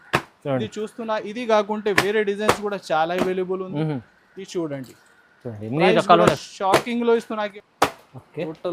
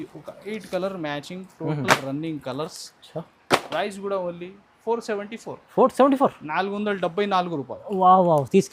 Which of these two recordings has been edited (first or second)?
first